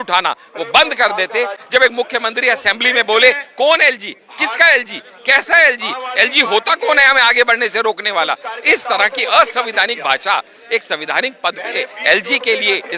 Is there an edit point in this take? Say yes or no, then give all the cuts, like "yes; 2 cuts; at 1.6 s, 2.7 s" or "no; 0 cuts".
yes; 1 cut; at 1.6 s